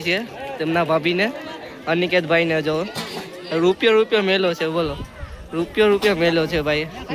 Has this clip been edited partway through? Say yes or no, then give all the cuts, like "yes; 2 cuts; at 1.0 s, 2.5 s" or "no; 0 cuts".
no; 0 cuts